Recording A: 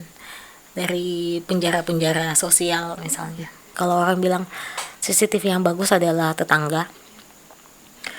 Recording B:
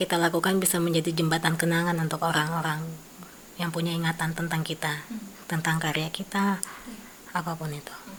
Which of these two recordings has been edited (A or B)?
A